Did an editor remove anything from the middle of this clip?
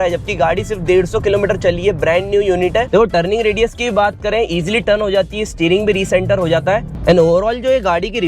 yes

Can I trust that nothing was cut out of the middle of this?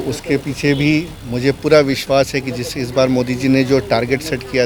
yes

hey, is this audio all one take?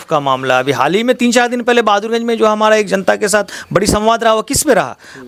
yes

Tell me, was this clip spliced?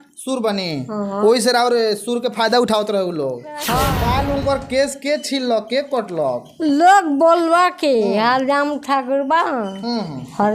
yes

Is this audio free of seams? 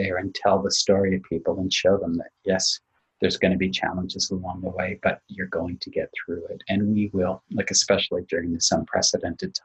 yes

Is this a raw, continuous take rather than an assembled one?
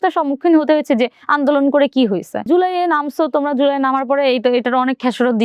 no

